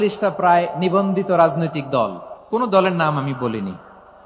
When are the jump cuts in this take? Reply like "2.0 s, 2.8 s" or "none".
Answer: 2.3 s